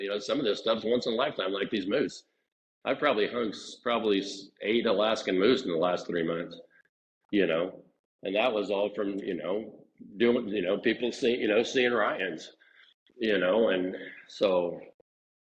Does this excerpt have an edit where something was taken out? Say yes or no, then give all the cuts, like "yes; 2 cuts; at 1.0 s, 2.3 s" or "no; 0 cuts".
no; 0 cuts